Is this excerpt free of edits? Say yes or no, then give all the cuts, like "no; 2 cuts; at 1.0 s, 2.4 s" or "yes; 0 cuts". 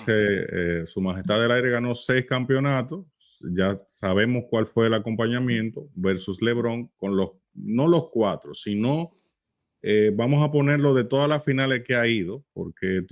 yes; 0 cuts